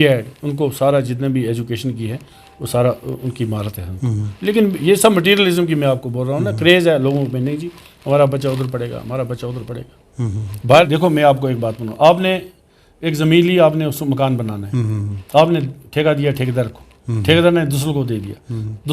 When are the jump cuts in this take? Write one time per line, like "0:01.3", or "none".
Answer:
0:10.9